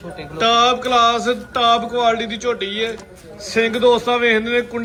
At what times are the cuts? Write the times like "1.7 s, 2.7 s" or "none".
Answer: none

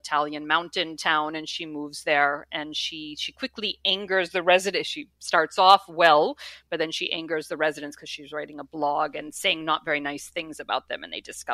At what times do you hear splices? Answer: none

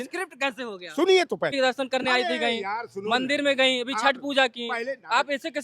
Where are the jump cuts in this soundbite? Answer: 1.5 s

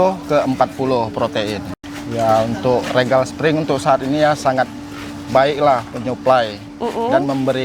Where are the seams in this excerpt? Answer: 1.7 s

